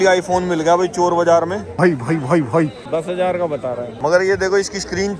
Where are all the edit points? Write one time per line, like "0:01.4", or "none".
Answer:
0:01.7
0:03.9